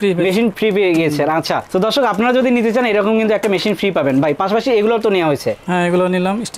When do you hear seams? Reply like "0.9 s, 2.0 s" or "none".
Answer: none